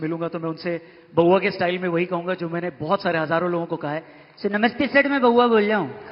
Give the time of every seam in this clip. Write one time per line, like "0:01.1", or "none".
none